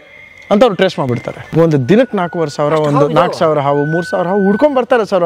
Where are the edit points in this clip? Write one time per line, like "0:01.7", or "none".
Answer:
0:01.5